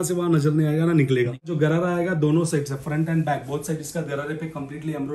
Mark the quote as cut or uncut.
cut